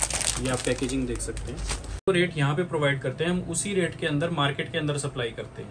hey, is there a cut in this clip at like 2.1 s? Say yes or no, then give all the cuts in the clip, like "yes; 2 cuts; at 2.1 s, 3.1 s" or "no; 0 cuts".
yes; 1 cut; at 2.1 s